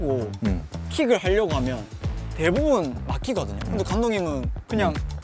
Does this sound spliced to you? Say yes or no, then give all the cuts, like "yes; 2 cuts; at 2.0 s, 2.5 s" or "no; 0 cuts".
yes; 1 cut; at 3.6 s